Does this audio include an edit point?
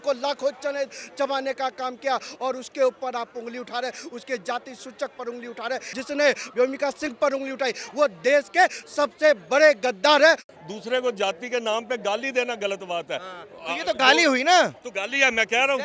yes; 2 cuts; at 6.3 s, 10.5 s

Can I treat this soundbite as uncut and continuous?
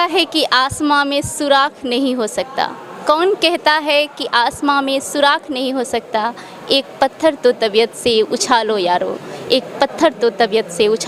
yes; 0 cuts

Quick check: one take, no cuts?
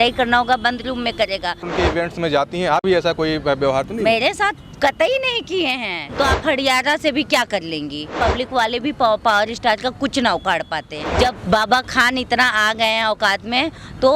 no; 4 cuts; at 1.6 s, 6.0 s, 8.1 s, 11.0 s

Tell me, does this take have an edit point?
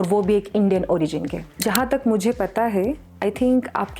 yes; 1 cut; at 1.6 s

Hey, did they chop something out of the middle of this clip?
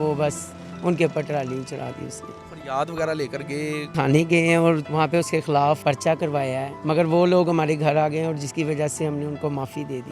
yes; 5 cuts; at 2.4 s, 3.9 s, 4.8 s, 5.8 s, 6.7 s

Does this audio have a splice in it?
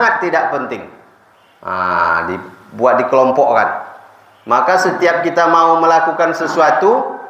no; 0 cuts

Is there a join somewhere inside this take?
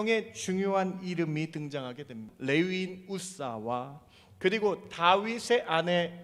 yes; 1 cut; at 2.3 s

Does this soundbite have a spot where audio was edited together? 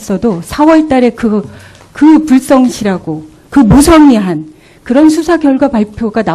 no; 0 cuts

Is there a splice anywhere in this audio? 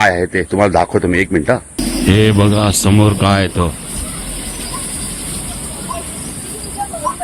no; 0 cuts

